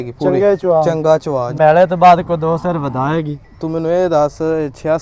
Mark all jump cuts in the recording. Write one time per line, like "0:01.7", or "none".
0:01.5